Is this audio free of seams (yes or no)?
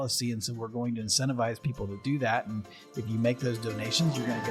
yes